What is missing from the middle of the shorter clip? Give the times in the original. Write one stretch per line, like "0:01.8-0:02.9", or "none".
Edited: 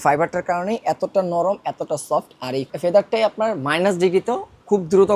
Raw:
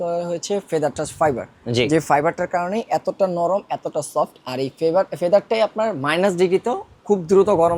0:04.8-0:05.1